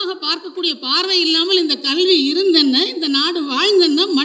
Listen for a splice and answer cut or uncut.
uncut